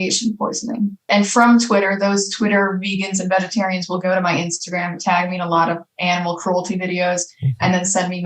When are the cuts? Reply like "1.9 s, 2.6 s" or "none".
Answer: 1.0 s